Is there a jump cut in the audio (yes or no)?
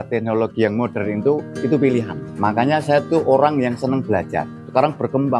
yes